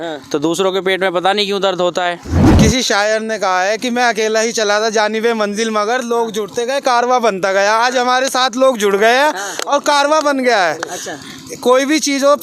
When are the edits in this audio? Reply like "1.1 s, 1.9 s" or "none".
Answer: 2.4 s